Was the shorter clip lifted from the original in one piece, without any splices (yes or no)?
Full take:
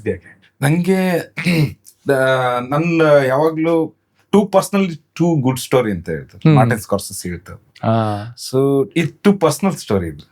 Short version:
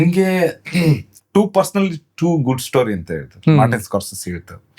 no